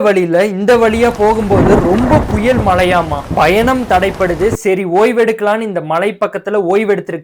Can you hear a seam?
yes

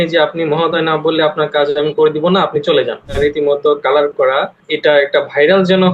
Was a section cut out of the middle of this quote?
yes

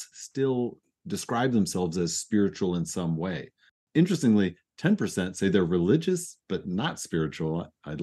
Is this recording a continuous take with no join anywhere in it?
no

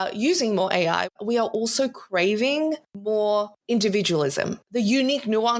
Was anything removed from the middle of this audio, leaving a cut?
yes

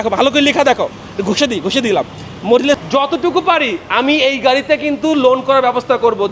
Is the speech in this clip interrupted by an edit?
yes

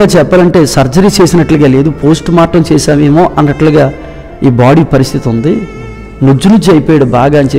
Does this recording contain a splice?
no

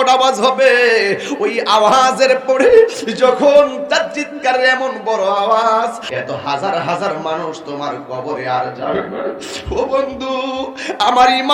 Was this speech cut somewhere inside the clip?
yes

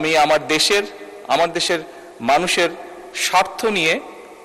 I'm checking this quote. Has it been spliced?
no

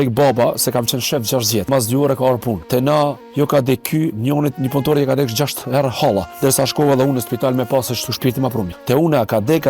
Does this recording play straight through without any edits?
no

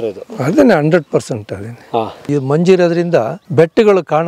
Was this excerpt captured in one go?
no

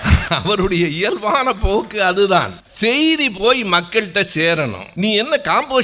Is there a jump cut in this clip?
yes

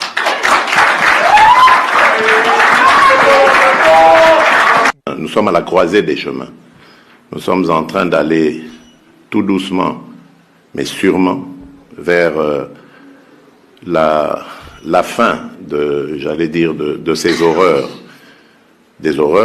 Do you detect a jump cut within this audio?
yes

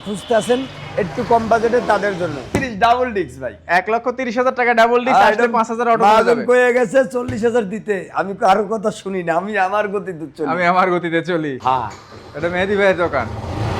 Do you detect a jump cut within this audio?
yes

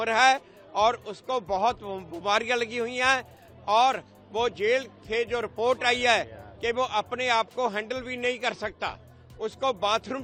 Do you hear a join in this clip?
no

